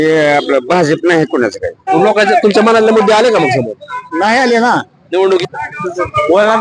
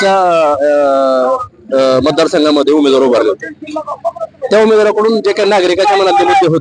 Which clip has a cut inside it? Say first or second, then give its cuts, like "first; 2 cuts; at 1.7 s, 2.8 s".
first; 2 cuts; at 1.9 s, 5.4 s